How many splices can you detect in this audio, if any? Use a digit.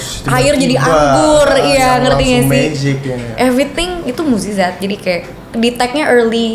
0